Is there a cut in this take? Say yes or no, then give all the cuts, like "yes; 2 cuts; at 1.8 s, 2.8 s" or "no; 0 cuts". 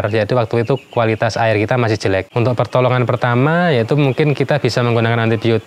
yes; 1 cut; at 2.3 s